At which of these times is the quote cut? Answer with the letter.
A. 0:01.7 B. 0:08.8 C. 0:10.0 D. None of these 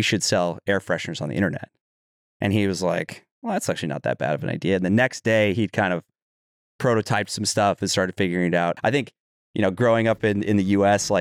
B